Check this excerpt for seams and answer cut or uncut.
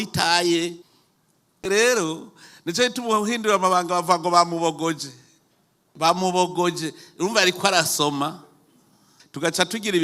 cut